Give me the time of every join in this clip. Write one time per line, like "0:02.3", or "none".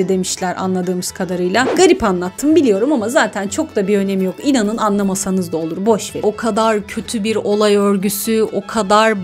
0:01.7
0:06.2